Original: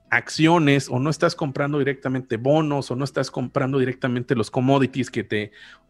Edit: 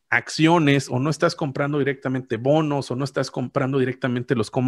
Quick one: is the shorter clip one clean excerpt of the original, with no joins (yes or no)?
yes